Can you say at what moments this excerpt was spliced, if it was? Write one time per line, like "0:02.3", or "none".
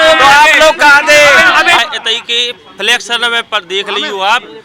0:01.8